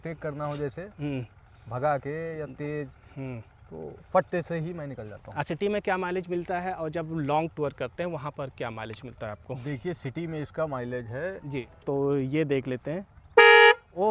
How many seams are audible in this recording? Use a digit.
2